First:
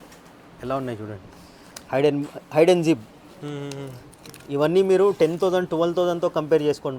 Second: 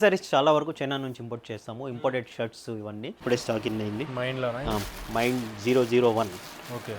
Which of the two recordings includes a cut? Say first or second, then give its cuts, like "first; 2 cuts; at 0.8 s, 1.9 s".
second; 1 cut; at 3.2 s